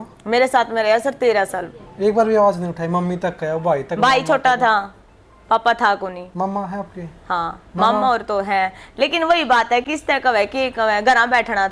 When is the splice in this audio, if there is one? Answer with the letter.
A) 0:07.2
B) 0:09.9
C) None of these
C